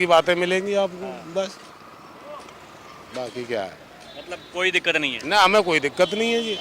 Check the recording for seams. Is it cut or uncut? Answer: uncut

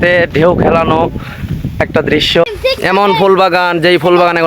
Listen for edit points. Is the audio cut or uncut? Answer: cut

